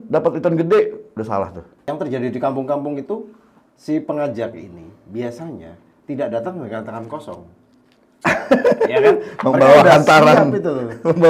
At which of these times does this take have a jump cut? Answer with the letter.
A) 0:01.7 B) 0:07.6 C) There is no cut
A